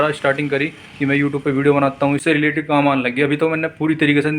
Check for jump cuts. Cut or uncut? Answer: cut